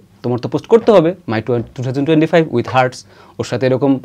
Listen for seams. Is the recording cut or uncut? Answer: uncut